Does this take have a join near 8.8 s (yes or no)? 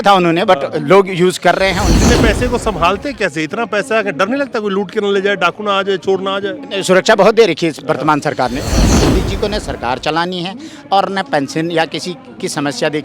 yes